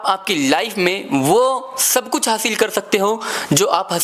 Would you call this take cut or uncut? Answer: uncut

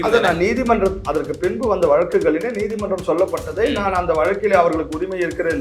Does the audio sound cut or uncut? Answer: uncut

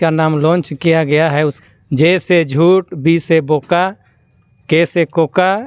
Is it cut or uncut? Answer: cut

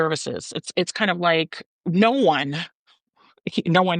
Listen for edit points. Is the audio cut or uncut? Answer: cut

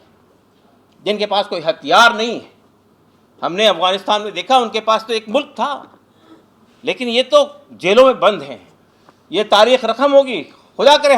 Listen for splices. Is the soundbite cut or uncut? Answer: uncut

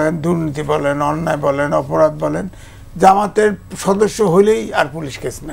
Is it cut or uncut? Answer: uncut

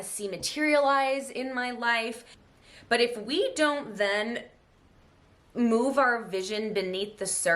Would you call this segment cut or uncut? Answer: cut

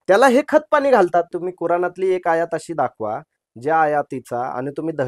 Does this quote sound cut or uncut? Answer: cut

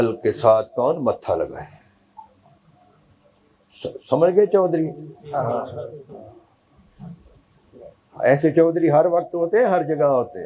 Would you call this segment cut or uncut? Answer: uncut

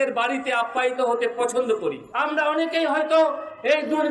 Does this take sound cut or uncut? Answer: cut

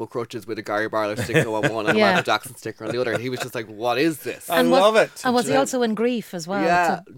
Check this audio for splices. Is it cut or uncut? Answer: uncut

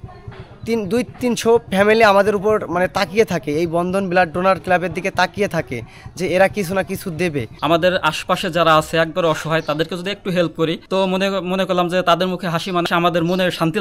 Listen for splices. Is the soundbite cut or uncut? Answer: cut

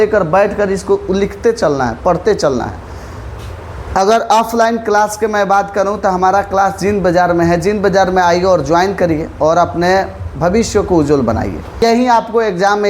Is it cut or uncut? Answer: cut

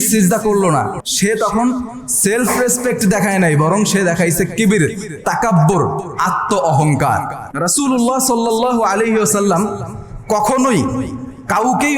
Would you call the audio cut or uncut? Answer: cut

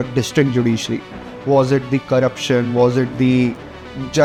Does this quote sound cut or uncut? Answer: uncut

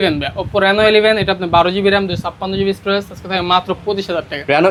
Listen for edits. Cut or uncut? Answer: uncut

